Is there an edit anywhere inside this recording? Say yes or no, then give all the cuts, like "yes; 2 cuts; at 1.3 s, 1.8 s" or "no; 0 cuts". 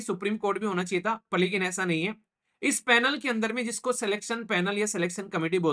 no; 0 cuts